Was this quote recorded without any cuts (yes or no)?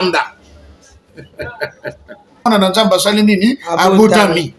no